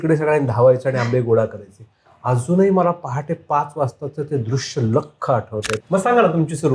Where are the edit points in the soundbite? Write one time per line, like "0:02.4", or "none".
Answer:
0:05.8